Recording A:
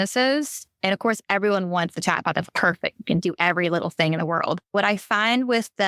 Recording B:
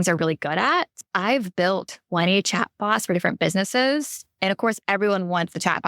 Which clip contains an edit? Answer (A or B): B